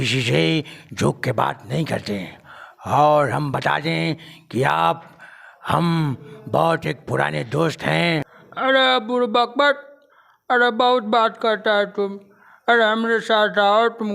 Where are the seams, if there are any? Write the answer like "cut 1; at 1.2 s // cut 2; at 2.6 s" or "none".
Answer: cut 1; at 8.4 s